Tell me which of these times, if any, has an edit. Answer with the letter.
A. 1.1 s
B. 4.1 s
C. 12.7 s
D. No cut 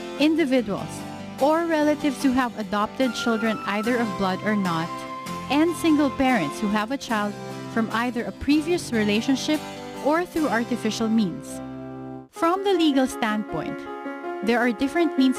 C